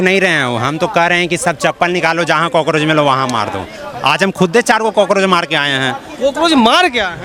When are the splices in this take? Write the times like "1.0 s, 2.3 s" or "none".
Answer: none